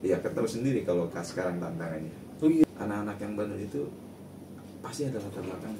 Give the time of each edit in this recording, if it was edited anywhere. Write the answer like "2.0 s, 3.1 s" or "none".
2.6 s